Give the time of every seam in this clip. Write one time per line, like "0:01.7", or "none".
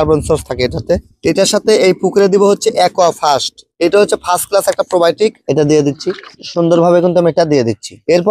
0:01.1
0:05.4